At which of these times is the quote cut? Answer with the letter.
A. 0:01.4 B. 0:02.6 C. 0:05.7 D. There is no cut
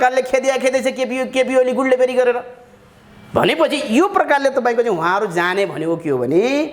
D